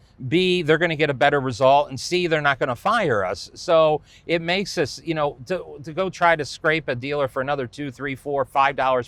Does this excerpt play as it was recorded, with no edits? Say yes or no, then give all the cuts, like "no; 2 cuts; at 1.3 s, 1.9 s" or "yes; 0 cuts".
yes; 0 cuts